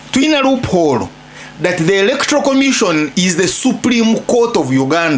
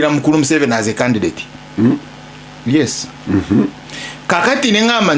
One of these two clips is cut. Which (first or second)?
second